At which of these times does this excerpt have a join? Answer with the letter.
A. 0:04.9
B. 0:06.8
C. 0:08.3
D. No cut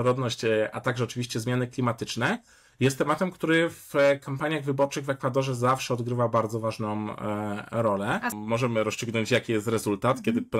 C